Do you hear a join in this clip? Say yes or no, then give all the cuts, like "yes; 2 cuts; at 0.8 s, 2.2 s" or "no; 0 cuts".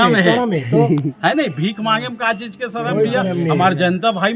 no; 0 cuts